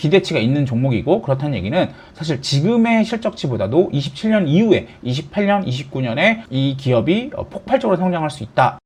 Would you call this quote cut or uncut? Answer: uncut